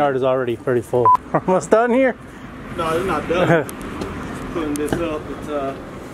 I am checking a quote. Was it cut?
yes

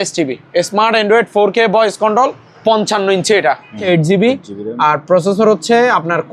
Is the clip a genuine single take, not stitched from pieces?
no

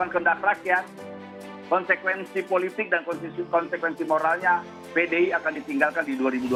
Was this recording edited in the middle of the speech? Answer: no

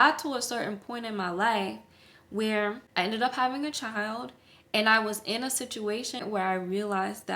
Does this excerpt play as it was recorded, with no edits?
no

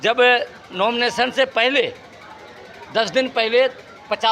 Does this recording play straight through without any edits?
yes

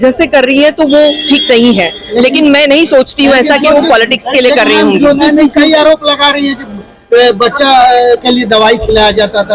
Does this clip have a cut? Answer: no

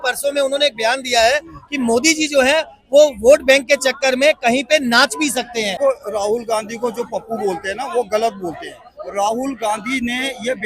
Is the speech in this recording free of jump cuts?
no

